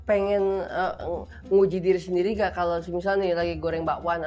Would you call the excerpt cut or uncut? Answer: uncut